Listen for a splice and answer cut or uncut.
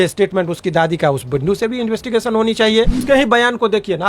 cut